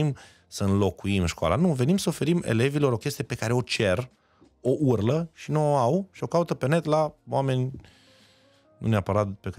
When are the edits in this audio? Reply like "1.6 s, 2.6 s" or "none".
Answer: none